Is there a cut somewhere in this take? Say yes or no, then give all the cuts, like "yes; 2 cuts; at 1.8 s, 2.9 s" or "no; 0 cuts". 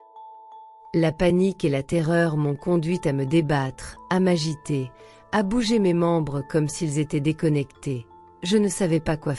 yes; 1 cut; at 0.9 s